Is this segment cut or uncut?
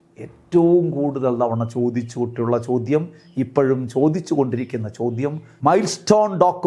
cut